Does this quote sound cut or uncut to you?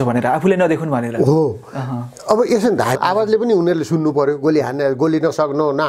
cut